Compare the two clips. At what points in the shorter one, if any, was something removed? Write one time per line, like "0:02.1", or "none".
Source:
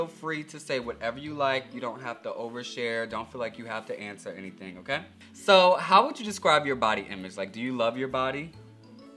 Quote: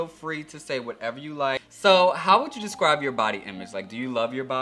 0:01.7